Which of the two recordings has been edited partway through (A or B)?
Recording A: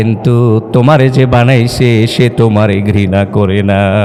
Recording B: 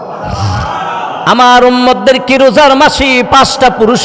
B